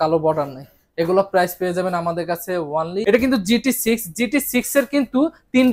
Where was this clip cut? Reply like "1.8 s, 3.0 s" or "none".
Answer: 3.0 s

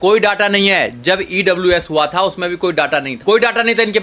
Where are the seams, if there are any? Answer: 3.1 s

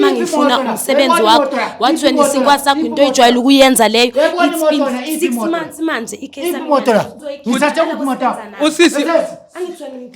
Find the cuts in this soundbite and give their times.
7.2 s

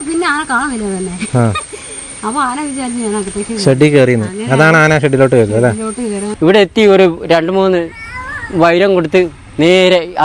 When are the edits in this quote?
6.3 s

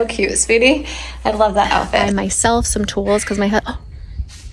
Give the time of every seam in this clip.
2.1 s

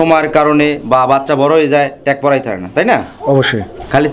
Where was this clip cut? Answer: none

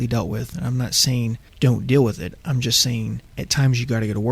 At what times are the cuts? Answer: 1.4 s, 3.3 s

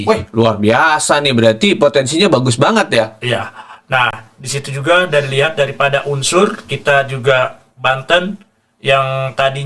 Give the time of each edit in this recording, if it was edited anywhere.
none

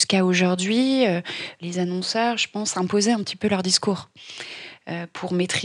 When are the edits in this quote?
1.5 s

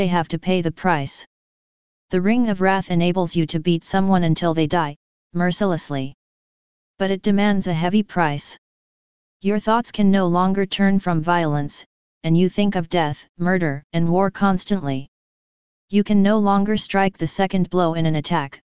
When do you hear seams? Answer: 4.1 s

